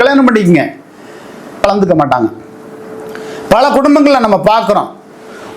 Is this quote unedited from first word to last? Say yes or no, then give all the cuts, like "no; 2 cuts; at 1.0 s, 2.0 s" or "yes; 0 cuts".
no; 1 cut; at 1.6 s